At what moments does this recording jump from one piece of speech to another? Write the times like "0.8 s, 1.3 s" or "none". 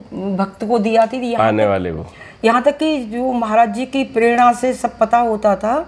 none

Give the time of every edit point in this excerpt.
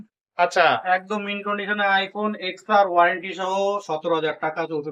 none

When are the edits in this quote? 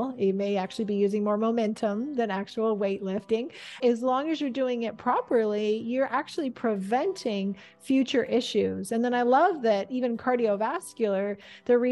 3.8 s

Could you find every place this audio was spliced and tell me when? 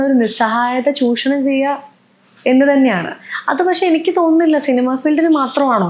none

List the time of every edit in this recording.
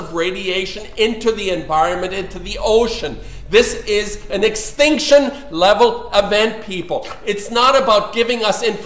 6.2 s

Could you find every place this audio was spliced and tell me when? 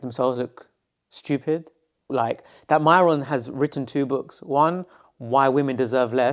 2.1 s

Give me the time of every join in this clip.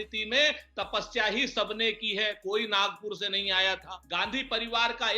4.0 s

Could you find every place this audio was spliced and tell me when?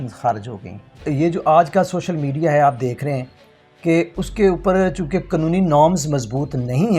1.1 s

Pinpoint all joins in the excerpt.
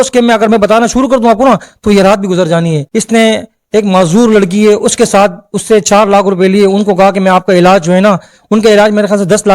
2.8 s

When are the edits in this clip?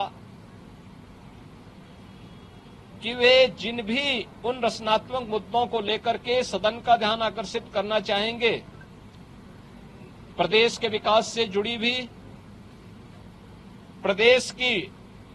none

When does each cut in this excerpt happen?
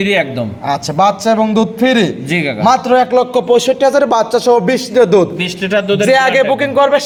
none

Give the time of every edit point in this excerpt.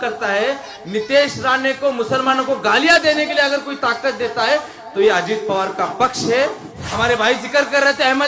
6.9 s

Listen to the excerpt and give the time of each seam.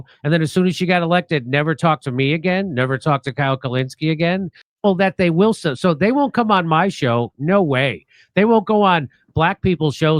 4.6 s

